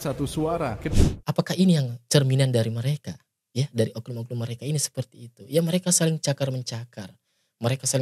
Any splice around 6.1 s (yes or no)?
no